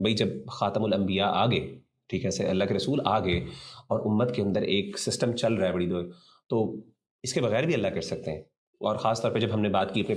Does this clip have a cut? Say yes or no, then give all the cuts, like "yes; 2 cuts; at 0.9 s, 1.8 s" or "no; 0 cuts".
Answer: no; 0 cuts